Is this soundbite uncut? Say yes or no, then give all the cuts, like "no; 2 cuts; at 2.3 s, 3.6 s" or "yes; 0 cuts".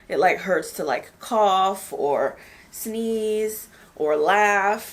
yes; 0 cuts